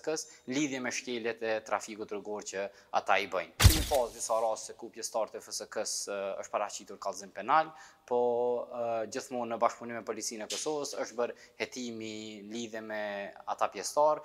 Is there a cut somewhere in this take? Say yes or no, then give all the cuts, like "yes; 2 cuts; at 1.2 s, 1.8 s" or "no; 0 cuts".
yes; 1 cut; at 3.6 s